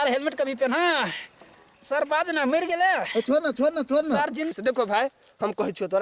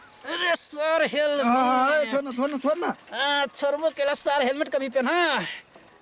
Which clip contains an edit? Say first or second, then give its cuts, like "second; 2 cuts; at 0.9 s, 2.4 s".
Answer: first; 1 cut; at 4.5 s